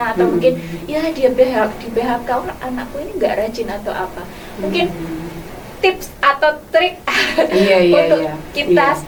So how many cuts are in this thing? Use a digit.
0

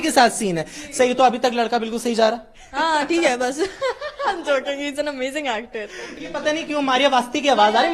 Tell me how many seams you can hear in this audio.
1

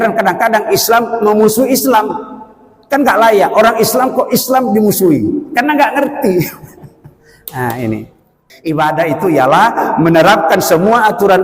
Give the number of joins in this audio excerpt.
1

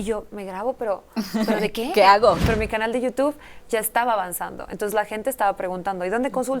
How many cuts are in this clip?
1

